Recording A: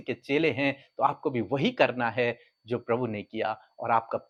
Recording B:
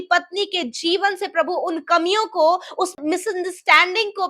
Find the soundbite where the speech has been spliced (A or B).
B